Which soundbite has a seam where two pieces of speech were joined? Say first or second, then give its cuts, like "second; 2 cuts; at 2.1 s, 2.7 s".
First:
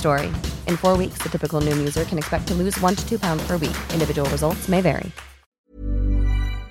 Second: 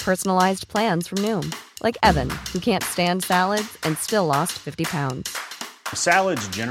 first; 1 cut; at 5.5 s